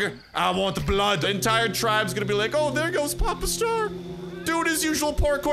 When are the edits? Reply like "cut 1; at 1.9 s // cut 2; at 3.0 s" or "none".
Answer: cut 1; at 1.2 s